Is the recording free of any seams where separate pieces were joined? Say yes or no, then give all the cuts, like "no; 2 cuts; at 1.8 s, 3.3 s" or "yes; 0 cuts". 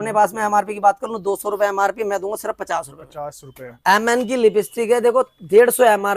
no; 1 cut; at 3.7 s